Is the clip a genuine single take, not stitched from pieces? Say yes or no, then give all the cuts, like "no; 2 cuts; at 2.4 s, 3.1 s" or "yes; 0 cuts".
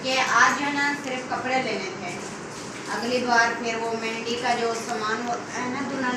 yes; 0 cuts